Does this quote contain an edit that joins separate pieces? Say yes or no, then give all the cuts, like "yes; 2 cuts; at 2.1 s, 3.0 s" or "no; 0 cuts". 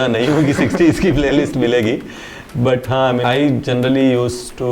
yes; 1 cut; at 3.2 s